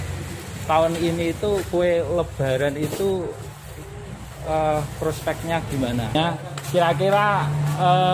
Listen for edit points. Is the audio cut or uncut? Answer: cut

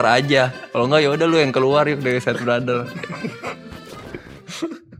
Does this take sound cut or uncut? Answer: uncut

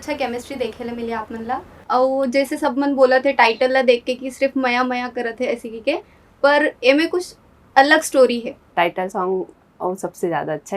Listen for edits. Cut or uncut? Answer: cut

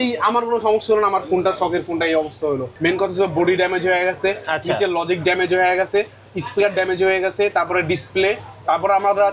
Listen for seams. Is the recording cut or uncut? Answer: cut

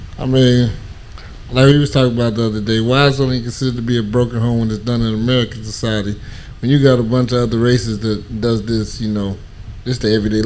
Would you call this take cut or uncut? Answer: uncut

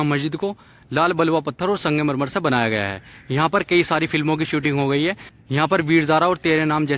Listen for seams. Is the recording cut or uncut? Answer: uncut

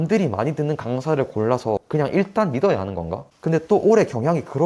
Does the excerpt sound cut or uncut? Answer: uncut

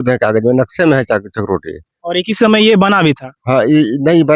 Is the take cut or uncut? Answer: uncut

